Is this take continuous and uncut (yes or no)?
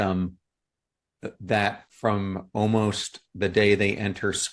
no